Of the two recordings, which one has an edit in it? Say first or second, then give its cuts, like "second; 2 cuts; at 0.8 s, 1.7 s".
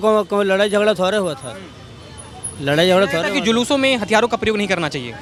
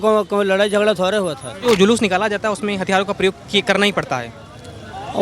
second; 1 cut; at 1.6 s